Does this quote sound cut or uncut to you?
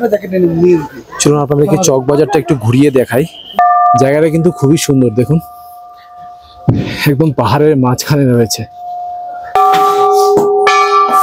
cut